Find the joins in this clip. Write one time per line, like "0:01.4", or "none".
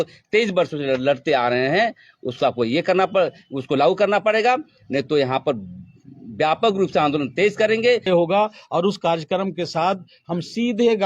0:08.1